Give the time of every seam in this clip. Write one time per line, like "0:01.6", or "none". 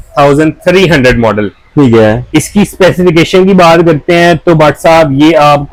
none